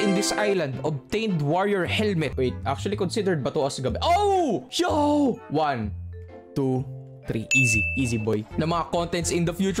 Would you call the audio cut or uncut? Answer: cut